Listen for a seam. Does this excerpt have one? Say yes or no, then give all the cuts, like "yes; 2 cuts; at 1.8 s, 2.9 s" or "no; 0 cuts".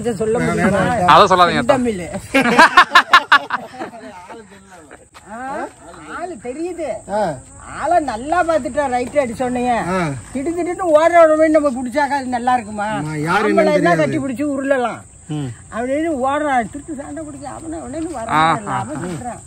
no; 0 cuts